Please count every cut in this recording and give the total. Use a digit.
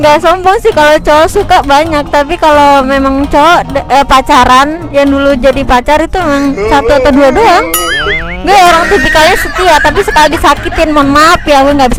0